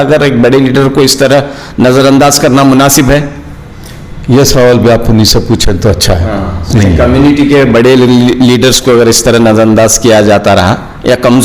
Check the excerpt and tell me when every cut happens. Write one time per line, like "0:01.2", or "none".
0:06.7